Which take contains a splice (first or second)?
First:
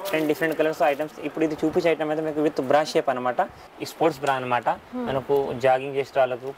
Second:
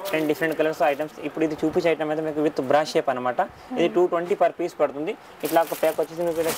first